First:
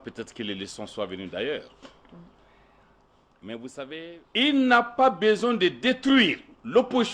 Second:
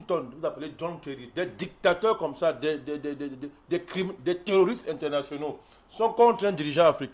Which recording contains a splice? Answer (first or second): first